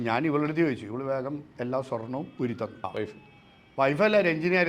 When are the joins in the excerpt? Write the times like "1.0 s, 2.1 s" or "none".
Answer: 2.8 s